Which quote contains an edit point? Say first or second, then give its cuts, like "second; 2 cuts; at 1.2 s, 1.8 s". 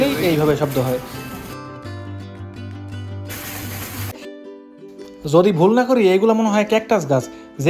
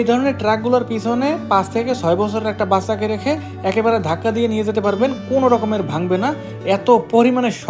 first; 1 cut; at 4.1 s